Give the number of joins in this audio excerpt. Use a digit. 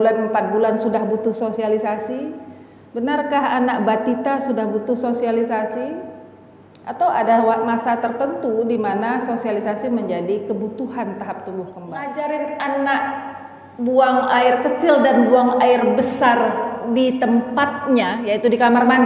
1